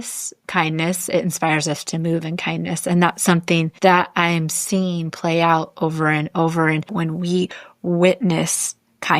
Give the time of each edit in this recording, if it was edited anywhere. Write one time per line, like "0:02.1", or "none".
0:03.7
0:06.9